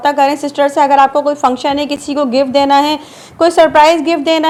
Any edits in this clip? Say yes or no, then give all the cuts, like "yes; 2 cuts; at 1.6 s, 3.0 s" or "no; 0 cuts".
no; 0 cuts